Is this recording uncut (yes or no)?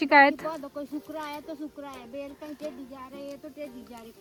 yes